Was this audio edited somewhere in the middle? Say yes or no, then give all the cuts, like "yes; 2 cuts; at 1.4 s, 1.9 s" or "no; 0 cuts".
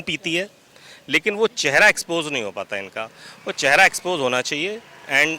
no; 0 cuts